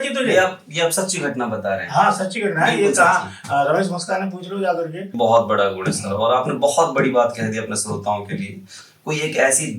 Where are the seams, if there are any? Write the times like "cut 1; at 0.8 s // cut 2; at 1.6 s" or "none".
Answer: cut 1; at 5.1 s // cut 2; at 8.7 s

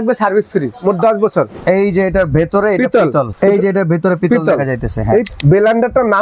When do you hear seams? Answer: cut 1; at 1.5 s // cut 2; at 3.3 s // cut 3; at 5.3 s

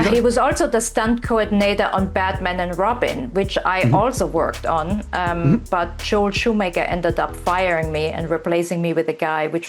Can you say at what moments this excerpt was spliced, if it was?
none

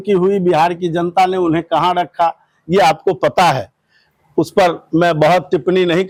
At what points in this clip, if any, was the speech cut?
none

